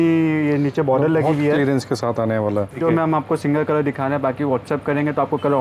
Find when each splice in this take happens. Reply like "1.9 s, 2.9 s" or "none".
2.8 s